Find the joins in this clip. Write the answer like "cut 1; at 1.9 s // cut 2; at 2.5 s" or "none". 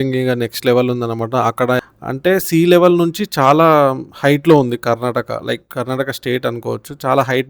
cut 1; at 1.8 s